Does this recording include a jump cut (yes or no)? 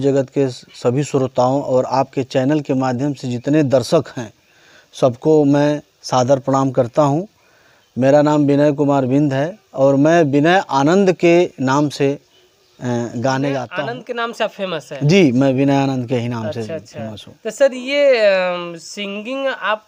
no